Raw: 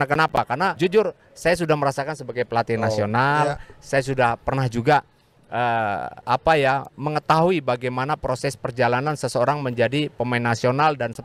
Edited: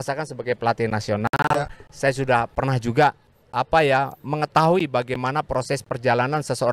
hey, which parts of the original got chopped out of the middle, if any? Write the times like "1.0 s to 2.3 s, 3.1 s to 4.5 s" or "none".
5.3 s to 6.1 s